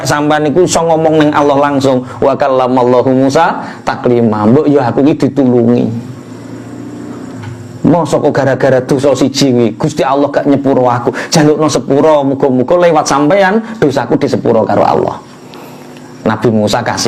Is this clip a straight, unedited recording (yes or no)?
yes